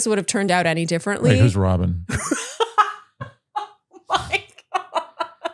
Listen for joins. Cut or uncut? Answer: uncut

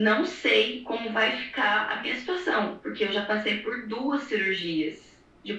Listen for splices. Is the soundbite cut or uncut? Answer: uncut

